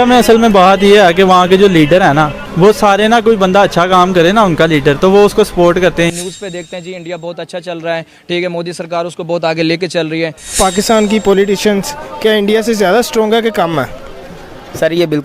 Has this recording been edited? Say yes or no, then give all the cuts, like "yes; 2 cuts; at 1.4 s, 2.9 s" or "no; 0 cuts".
yes; 3 cuts; at 2.4 s, 6.1 s, 10.6 s